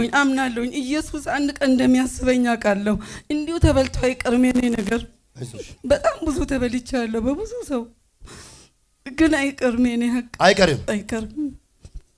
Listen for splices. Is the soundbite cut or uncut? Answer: uncut